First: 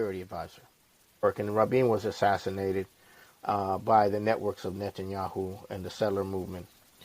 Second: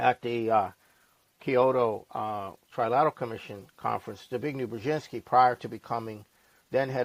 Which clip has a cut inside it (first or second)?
first